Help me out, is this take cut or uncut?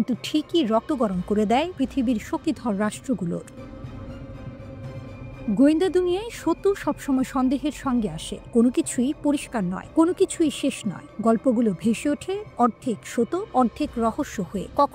uncut